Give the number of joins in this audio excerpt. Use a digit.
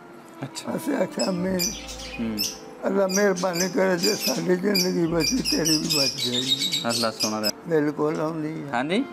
1